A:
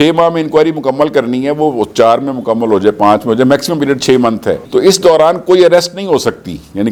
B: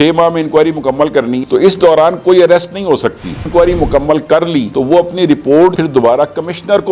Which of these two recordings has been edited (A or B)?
B